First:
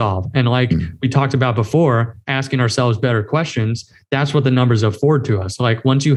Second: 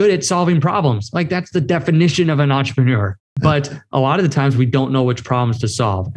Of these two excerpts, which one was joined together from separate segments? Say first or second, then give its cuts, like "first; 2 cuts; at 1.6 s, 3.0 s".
second; 1 cut; at 3.1 s